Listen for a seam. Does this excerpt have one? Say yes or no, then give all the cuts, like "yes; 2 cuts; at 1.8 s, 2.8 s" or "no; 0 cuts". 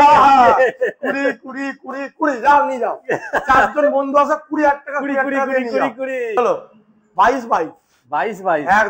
yes; 1 cut; at 6.3 s